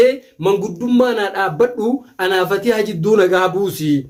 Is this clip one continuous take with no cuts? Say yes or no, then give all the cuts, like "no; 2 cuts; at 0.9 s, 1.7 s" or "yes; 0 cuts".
yes; 0 cuts